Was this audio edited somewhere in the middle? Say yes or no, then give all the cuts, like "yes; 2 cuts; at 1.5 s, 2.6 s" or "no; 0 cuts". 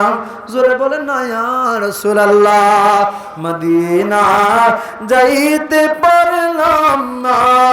no; 0 cuts